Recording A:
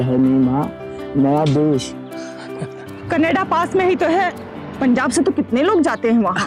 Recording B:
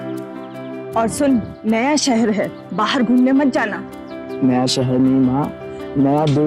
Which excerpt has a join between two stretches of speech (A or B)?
B